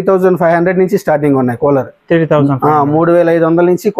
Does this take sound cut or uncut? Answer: uncut